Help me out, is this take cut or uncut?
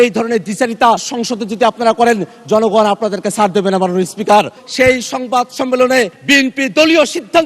cut